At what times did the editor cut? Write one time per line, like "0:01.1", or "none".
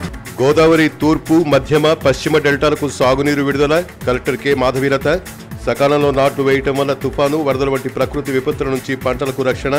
none